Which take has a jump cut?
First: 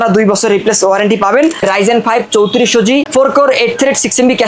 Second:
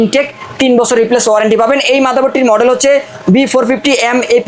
first; 2 cuts; at 1.6 s, 3.1 s

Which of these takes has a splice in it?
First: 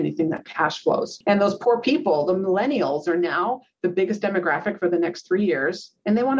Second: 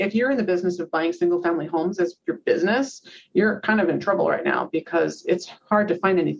first; 1 cut; at 1.1 s

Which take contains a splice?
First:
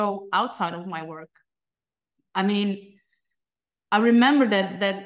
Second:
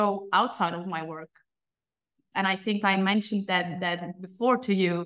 second; 1 cut; at 2.2 s

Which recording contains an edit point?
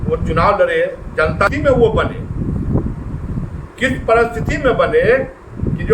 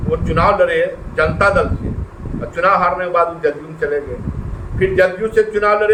first; 1 cut; at 1.5 s

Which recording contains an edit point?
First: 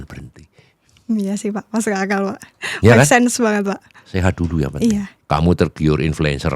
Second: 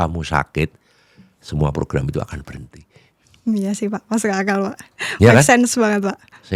first; 1 cut; at 5.1 s

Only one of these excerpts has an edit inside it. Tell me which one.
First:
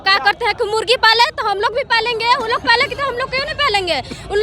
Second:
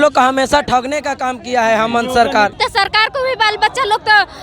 second; 1 cut; at 2.6 s

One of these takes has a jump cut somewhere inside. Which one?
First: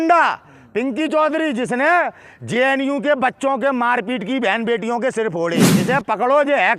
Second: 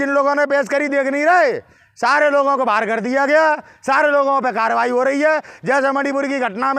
first; 1 cut; at 5.7 s

